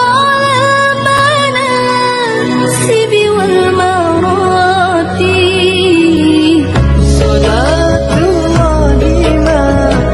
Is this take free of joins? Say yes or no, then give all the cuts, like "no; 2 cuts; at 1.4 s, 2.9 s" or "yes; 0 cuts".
yes; 0 cuts